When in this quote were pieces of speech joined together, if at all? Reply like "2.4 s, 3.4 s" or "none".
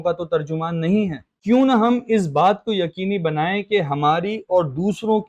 1.3 s

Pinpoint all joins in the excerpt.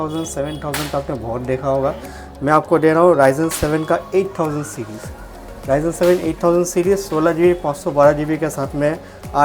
none

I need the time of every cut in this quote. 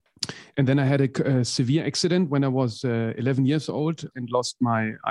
4.2 s

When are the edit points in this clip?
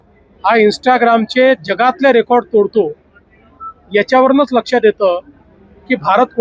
none

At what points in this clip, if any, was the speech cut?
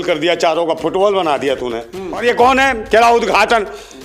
2.2 s

